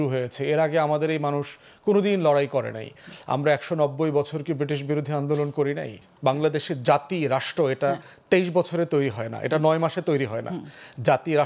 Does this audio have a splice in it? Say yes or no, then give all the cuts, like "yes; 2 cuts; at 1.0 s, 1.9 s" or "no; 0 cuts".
yes; 1 cut; at 6.0 s